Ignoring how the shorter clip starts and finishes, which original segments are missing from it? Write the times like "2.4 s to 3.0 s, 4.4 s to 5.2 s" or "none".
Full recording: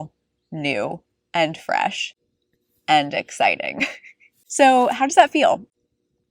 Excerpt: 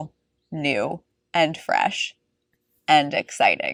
none